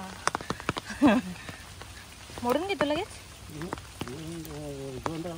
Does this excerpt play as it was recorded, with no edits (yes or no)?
no